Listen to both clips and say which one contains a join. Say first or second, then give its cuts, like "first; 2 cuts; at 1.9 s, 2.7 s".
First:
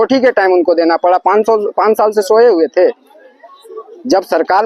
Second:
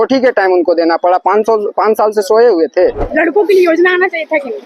second; 1 cut; at 3.1 s